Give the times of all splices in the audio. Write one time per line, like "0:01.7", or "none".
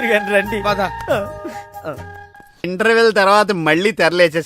0:02.6